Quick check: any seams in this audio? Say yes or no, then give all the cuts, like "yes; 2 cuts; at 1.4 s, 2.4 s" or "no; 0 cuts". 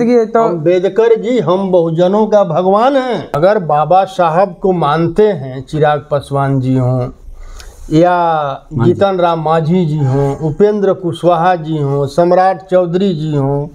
yes; 1 cut; at 3.3 s